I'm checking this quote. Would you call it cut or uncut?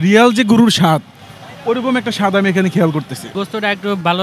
cut